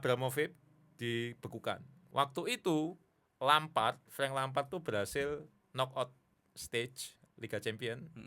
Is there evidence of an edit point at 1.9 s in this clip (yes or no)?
yes